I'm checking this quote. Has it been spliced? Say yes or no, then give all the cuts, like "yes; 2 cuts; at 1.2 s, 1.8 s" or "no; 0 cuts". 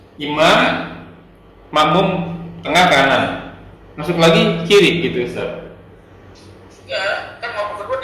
no; 0 cuts